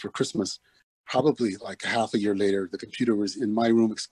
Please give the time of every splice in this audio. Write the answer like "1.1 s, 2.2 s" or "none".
1.1 s